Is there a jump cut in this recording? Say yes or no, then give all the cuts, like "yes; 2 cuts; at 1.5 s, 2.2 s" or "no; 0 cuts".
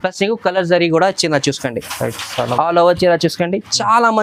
no; 0 cuts